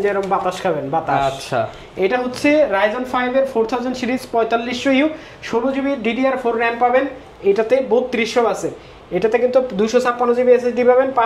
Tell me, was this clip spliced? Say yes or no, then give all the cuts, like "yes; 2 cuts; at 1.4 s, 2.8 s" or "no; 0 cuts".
no; 0 cuts